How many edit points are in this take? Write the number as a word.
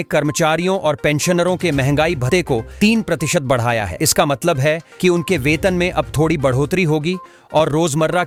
zero